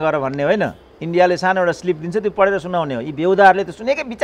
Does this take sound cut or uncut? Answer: uncut